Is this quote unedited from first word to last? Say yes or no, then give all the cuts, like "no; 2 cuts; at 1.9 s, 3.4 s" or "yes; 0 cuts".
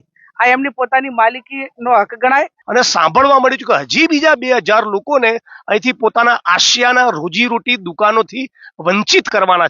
no; 1 cut; at 2.6 s